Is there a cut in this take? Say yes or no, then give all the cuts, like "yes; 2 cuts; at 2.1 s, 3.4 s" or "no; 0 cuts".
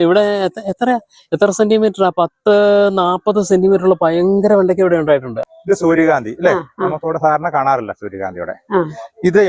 yes; 1 cut; at 5.3 s